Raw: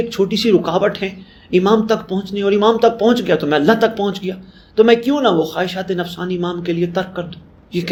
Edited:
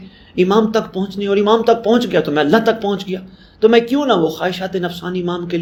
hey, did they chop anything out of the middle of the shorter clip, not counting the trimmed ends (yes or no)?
no